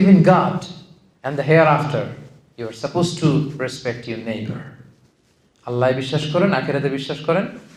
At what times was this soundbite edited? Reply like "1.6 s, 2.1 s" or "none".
none